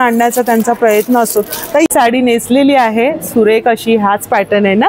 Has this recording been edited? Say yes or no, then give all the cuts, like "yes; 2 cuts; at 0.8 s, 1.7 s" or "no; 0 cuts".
yes; 1 cut; at 1.9 s